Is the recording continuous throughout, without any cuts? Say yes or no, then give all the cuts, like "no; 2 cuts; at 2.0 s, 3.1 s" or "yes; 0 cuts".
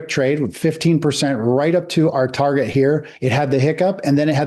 no; 1 cut; at 3.1 s